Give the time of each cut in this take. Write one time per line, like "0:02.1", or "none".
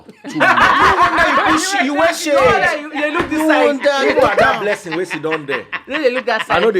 none